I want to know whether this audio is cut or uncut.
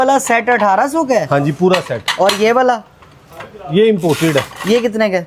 uncut